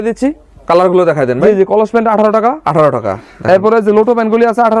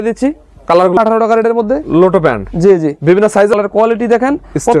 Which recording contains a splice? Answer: second; 2 cuts; at 1.0 s, 3.5 s

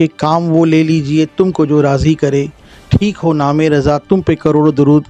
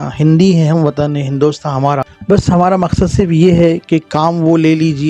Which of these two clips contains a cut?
second; 1 cut; at 2.1 s

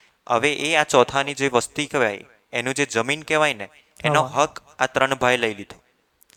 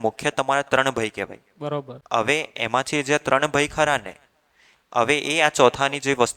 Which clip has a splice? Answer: second; 1 cut; at 1.9 s

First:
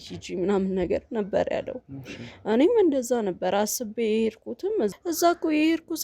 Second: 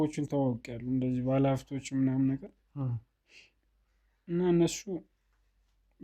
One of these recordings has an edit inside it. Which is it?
first; 1 cut; at 4.9 s

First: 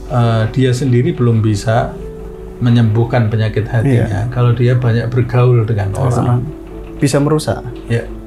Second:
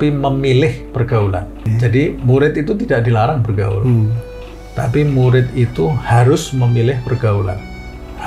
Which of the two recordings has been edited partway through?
second; 1 cut; at 1.7 s

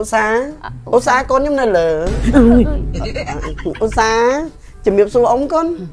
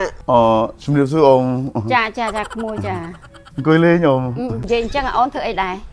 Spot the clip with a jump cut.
second; 1 cut; at 4.6 s

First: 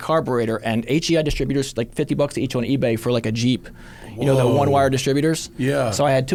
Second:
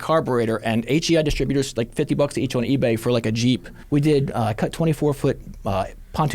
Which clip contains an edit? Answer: second; 1 cut; at 3.7 s

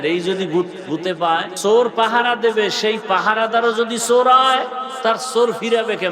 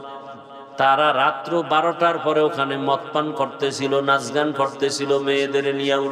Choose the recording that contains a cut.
first; 2 cuts; at 1.5 s, 4.8 s

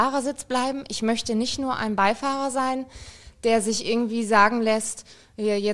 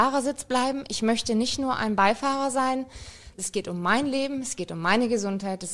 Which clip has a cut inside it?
second; 1 cut; at 3.3 s

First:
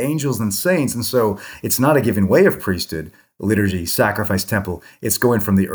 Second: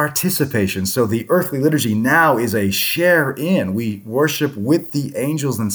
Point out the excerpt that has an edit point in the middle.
first; 1 cut; at 1.5 s

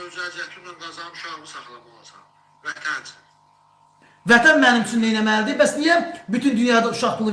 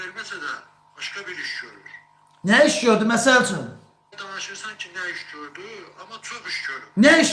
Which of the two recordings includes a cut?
second; 1 cut; at 4.2 s

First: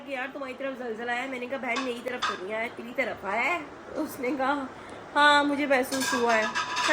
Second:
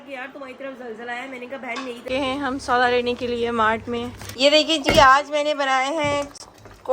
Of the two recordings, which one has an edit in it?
second; 2 cuts; at 2.0 s, 4.2 s

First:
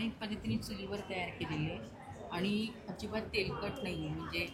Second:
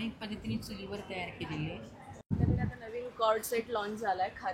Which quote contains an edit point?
second; 1 cut; at 2.3 s

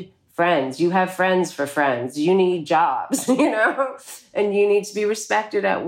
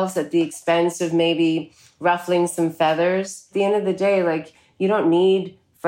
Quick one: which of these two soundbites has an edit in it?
second; 1 cut; at 3.5 s

